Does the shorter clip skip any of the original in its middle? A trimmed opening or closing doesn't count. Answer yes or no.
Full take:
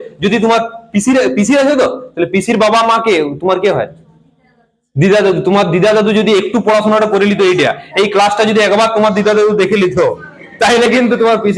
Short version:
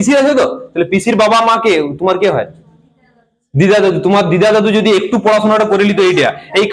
no